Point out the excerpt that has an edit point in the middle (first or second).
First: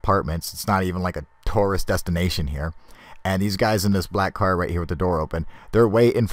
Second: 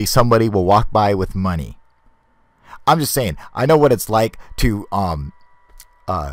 second